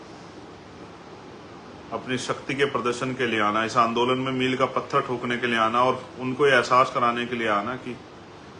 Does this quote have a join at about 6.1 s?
no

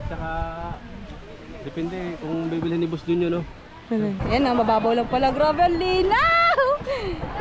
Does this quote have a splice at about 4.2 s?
yes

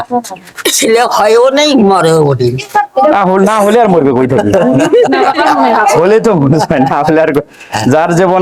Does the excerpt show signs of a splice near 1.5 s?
no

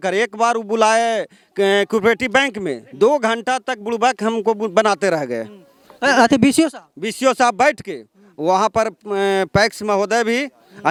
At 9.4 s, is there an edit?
no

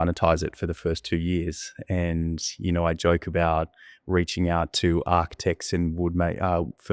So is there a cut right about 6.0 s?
no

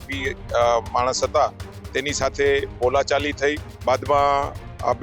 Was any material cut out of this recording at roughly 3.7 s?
yes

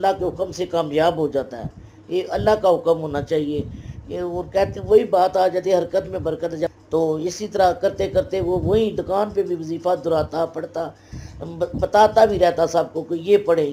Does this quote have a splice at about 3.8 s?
no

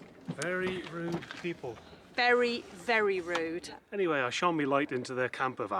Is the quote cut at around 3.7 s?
yes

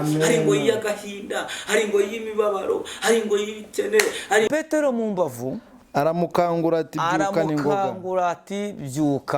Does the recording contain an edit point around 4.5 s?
yes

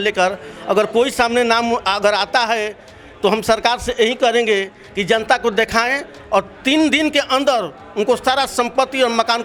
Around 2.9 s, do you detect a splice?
no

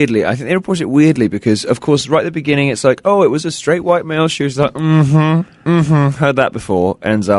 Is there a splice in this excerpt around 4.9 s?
no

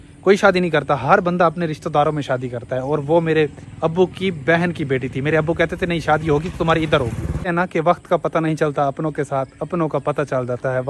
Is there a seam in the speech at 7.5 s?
yes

